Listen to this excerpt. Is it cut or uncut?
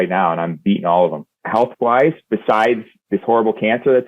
cut